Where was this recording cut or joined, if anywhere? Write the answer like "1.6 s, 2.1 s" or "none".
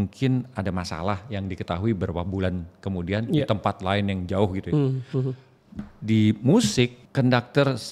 7.0 s